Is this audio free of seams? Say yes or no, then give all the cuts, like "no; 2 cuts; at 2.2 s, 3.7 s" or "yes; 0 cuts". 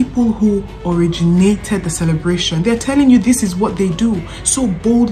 yes; 0 cuts